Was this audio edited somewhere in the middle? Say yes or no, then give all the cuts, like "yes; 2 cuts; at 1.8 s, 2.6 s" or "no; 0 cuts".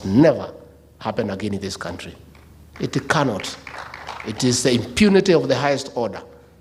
no; 0 cuts